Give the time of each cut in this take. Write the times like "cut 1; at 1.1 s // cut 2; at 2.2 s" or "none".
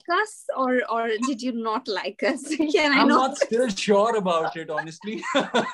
none